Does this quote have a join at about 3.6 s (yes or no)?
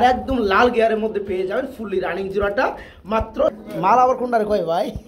yes